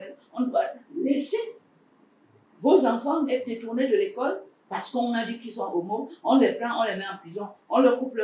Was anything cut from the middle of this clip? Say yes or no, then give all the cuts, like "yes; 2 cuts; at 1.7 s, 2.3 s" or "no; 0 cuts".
no; 0 cuts